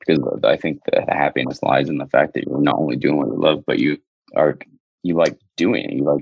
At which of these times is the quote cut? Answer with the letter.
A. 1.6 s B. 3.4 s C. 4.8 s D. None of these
C